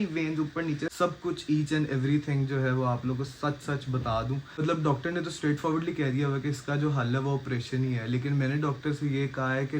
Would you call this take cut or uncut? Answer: cut